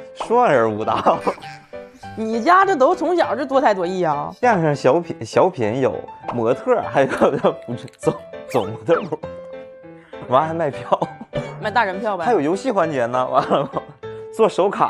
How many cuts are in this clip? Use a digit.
0